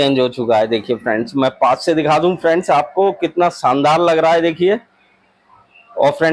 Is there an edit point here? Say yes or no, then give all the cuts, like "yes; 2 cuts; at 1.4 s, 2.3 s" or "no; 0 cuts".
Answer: no; 0 cuts